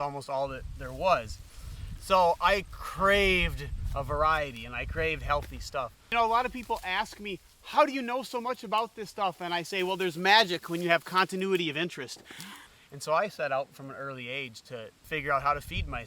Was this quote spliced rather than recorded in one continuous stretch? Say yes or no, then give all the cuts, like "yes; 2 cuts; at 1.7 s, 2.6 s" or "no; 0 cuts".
yes; 3 cuts; at 6.1 s, 12.5 s, 15.0 s